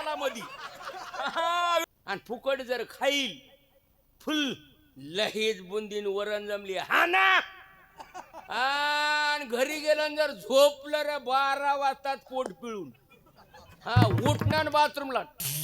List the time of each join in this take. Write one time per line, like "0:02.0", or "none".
0:01.9